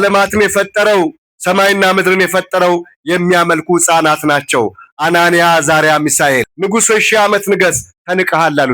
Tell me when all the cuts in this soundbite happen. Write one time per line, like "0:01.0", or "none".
0:06.5

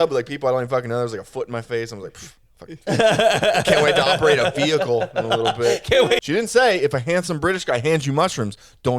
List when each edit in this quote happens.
0:06.2

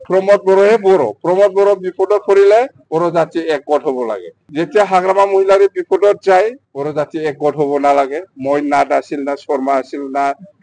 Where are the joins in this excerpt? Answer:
none

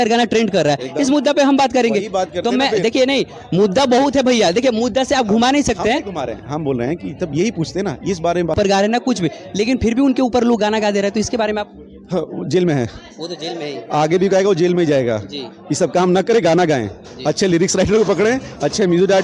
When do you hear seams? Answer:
0:08.6

